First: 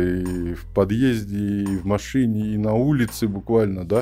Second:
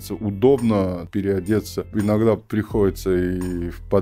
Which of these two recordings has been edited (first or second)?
second